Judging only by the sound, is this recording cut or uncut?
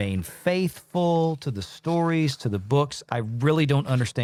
uncut